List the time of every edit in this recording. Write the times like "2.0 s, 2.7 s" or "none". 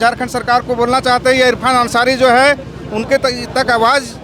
none